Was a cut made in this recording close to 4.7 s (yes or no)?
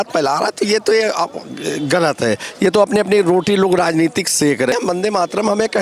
yes